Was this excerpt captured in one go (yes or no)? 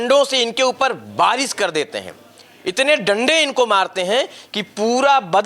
yes